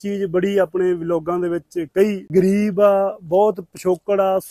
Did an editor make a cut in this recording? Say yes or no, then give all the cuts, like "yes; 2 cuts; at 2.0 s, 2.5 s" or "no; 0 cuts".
yes; 1 cut; at 2.3 s